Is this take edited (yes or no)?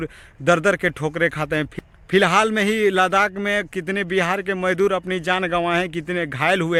no